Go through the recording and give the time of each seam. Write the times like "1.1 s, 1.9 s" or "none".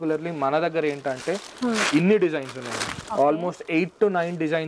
none